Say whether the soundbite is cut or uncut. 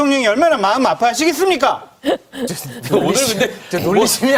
uncut